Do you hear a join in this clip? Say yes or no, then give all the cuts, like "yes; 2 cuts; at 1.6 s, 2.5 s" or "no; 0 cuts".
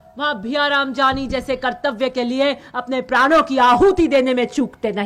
no; 0 cuts